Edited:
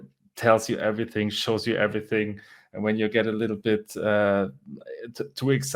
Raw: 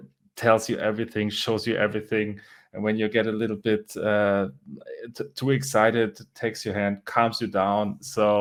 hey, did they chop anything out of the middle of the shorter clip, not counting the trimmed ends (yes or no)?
no